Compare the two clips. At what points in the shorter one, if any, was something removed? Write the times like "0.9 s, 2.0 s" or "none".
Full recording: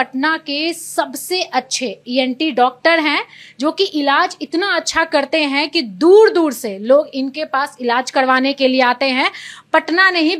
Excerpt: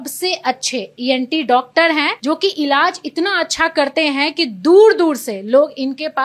2.1 s